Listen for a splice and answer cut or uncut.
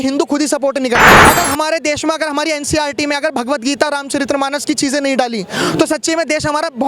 cut